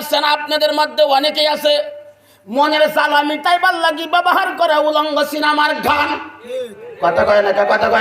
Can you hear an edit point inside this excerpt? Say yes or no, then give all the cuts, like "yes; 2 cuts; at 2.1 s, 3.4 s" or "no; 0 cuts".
no; 0 cuts